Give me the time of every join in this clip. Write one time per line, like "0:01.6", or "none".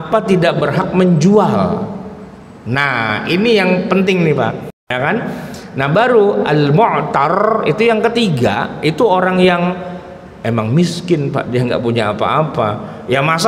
0:04.8